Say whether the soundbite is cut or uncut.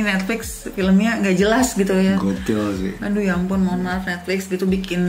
uncut